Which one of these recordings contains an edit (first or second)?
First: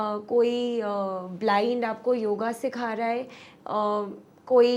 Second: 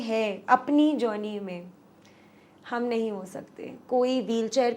second